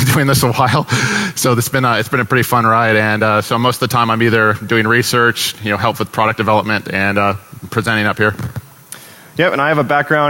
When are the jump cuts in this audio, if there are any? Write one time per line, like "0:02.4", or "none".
none